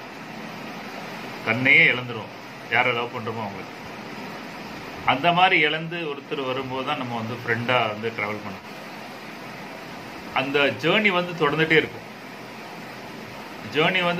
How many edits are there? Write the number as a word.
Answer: one